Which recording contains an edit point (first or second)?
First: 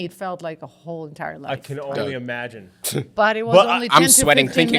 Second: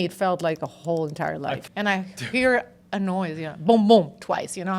second